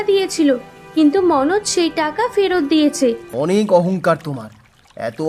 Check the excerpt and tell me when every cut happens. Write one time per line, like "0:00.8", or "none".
0:03.3